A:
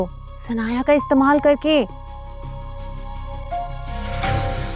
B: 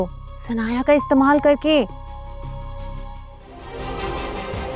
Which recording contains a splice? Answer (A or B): B